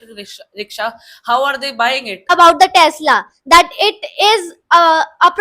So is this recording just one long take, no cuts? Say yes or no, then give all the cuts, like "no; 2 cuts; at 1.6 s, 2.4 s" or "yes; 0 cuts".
no; 1 cut; at 2.3 s